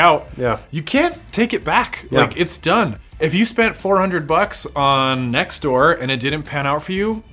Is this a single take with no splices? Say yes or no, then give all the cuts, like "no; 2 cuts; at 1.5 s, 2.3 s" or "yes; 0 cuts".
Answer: no; 1 cut; at 3.2 s